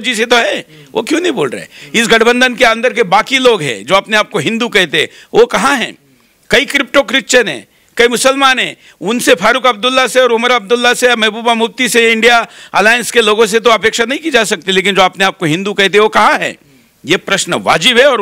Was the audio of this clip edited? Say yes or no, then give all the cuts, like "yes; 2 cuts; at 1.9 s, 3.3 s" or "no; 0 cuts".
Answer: no; 0 cuts